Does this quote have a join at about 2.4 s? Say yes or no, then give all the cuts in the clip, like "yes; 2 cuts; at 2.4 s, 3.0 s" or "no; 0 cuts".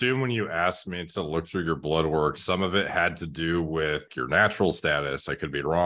yes; 2 cuts; at 2.4 s, 4.1 s